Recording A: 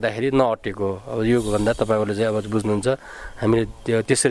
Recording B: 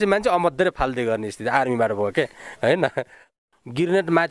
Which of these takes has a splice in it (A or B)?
B